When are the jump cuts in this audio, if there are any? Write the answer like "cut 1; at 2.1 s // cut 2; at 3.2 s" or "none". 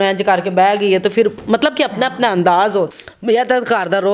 cut 1; at 3.0 s